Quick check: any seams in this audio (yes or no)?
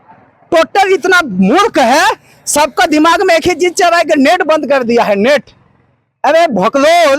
no